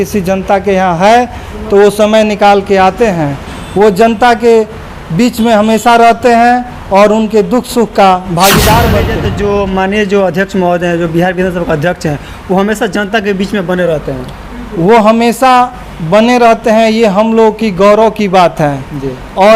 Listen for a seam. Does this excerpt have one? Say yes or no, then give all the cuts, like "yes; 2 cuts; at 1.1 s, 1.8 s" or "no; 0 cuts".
yes; 1 cut; at 9.2 s